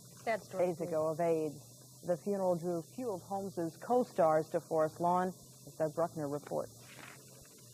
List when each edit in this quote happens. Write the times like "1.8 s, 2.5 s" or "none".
6.5 s